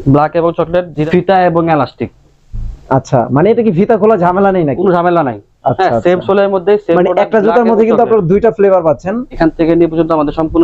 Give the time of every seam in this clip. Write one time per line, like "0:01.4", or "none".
0:01.1
0:09.3